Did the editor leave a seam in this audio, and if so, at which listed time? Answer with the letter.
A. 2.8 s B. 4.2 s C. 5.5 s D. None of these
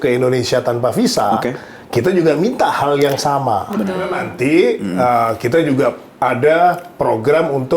B